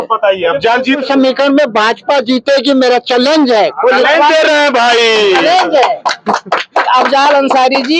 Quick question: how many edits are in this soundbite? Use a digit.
1